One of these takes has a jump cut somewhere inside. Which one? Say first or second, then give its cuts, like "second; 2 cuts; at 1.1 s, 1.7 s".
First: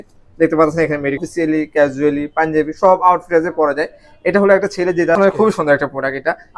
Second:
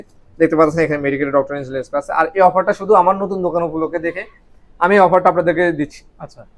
first; 2 cuts; at 1.2 s, 5.2 s